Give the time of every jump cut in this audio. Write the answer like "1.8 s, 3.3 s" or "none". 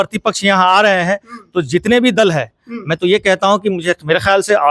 none